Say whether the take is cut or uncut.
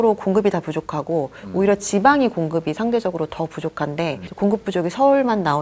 uncut